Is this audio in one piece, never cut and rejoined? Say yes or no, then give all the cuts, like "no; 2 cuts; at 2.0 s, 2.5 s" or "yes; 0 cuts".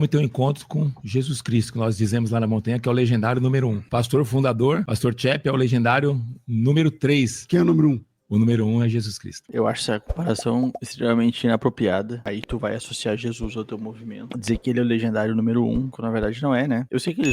no; 4 cuts; at 3.8 s, 4.9 s, 7.4 s, 9.4 s